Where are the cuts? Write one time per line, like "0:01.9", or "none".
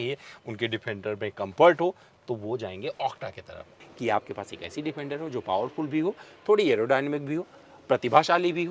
0:03.7